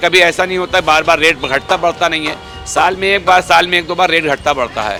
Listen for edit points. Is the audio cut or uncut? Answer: uncut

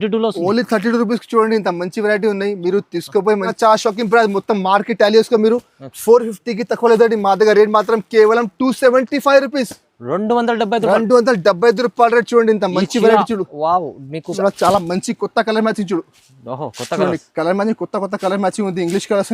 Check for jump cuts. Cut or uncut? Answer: cut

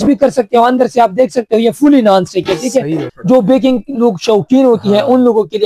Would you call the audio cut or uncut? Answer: cut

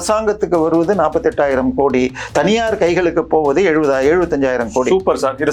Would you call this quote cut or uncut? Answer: uncut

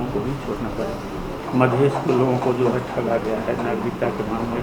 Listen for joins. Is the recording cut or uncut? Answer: cut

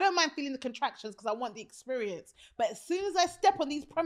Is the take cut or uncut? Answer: uncut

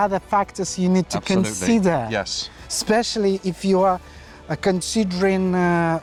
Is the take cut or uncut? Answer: uncut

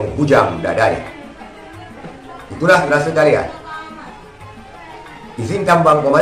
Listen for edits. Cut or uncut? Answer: uncut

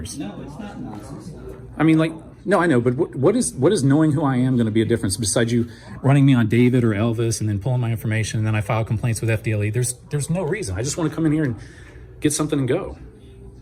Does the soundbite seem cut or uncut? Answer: uncut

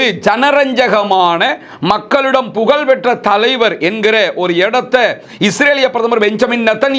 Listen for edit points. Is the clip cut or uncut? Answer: uncut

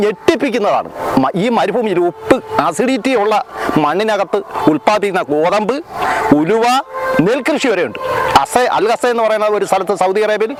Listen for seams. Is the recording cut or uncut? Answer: uncut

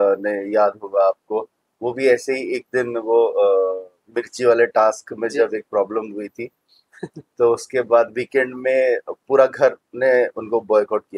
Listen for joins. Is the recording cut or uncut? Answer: uncut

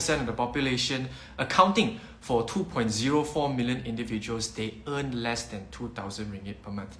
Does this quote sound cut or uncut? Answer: uncut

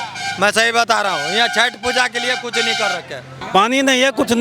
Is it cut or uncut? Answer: cut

